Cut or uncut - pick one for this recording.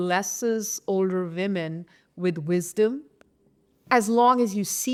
uncut